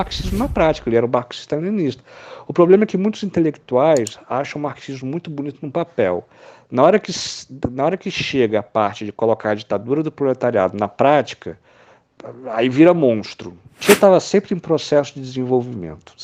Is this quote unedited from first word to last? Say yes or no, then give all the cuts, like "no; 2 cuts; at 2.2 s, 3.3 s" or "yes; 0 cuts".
no; 1 cut; at 13.8 s